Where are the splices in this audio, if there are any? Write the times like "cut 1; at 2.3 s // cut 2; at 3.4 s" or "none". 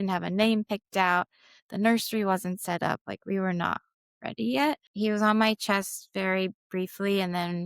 cut 1; at 4.9 s